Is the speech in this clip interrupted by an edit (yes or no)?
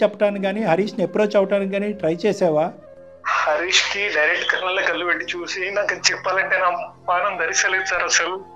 no